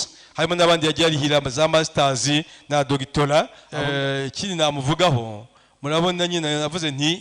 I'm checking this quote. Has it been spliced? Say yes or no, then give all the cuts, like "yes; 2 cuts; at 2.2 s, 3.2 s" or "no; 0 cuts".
yes; 1 cut; at 3.6 s